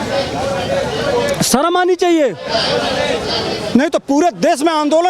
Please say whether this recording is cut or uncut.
uncut